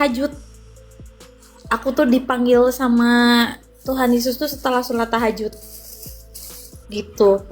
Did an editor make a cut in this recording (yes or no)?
no